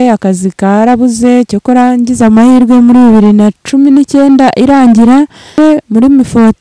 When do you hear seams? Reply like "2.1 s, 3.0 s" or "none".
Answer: 5.6 s